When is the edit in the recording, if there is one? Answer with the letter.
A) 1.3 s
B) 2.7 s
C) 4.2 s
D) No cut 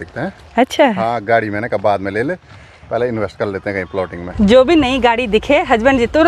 C